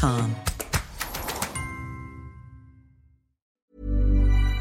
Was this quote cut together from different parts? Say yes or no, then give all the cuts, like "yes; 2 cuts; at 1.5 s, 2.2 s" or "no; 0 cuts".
yes; 1 cut; at 3.4 s